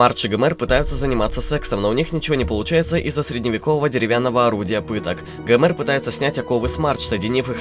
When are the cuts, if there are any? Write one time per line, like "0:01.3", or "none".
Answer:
0:01.1